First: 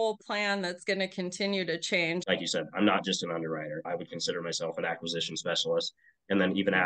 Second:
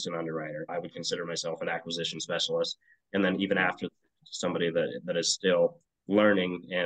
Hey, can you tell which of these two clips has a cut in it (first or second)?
first